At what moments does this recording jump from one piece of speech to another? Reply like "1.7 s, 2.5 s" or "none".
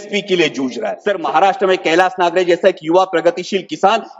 0.9 s